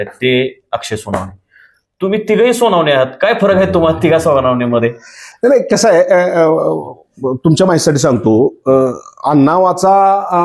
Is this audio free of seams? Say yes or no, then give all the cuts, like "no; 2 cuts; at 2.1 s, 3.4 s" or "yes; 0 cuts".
yes; 0 cuts